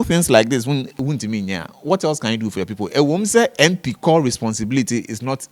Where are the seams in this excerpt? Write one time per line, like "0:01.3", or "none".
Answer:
0:00.9